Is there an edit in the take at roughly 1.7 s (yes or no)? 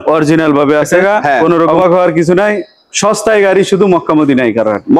yes